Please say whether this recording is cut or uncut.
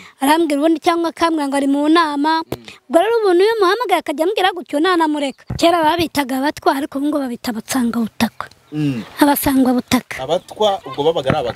cut